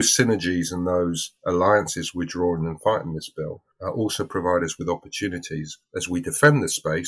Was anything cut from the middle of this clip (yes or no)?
no